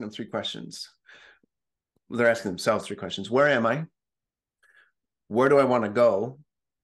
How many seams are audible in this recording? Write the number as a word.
zero